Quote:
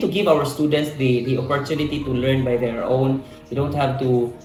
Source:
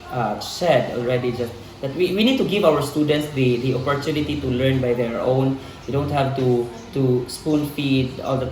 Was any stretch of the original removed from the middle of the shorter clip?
no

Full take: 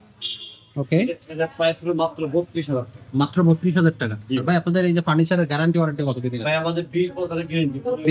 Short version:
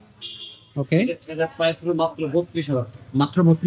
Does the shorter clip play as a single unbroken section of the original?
yes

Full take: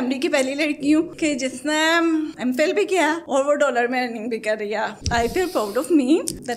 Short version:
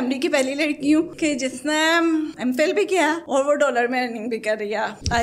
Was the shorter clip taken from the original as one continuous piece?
yes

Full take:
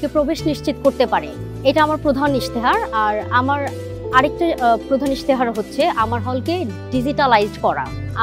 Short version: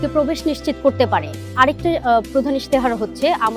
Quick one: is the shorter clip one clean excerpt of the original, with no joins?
no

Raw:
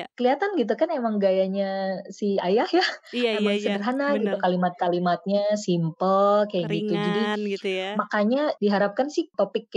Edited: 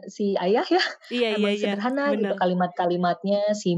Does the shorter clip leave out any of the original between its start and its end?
no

